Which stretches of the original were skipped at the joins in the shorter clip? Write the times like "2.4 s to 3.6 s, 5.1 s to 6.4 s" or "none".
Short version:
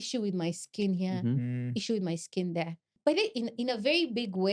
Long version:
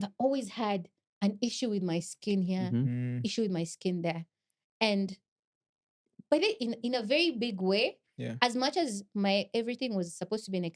4.3 s to 6.1 s